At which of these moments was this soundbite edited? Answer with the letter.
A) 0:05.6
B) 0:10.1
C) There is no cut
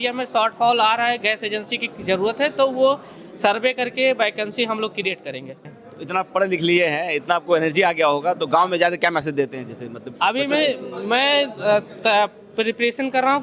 A